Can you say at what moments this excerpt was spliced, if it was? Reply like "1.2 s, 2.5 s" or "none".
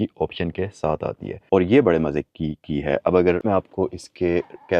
1.5 s